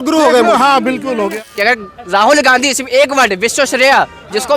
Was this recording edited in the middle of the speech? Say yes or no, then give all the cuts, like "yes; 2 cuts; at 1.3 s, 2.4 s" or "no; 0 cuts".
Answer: yes; 1 cut; at 1.5 s